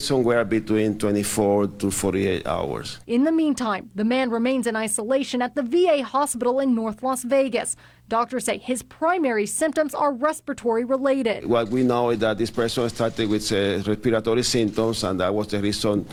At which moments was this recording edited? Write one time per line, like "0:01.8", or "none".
none